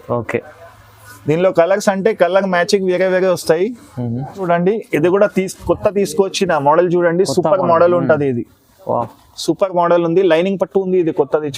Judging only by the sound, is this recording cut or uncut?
cut